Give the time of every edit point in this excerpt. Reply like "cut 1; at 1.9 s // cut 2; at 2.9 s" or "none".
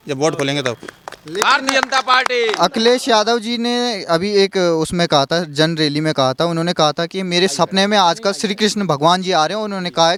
none